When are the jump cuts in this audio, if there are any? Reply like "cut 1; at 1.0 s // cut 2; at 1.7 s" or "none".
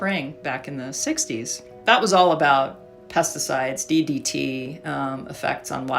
cut 1; at 1.6 s